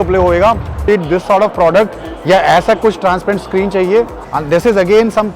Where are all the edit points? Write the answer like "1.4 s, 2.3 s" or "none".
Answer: 0.9 s, 4.3 s